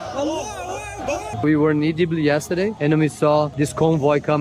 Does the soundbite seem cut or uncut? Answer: cut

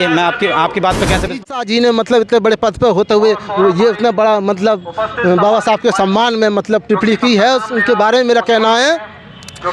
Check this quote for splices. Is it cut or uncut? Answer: cut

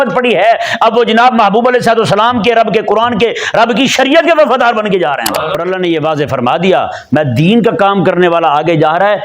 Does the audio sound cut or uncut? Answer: cut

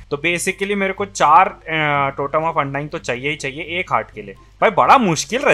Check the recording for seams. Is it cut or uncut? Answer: uncut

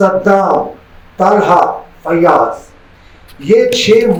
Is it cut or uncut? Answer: uncut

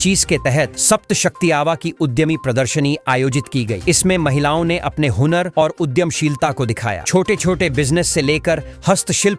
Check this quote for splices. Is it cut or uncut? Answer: uncut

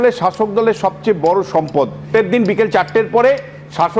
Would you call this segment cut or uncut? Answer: cut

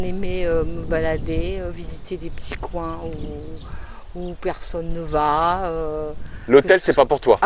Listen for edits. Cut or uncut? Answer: uncut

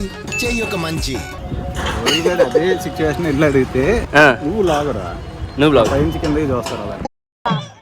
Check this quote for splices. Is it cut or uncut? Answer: cut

